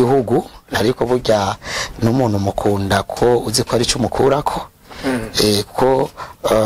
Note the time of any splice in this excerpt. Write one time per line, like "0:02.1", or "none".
none